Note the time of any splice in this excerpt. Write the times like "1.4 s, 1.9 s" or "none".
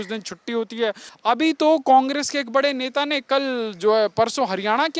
1.1 s